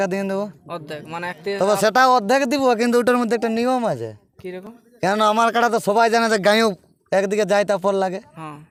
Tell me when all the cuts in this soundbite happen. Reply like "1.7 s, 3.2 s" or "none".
none